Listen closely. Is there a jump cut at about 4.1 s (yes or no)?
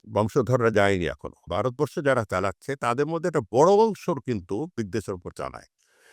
no